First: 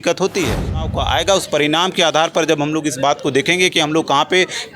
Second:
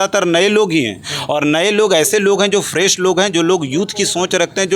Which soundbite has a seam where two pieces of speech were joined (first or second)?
first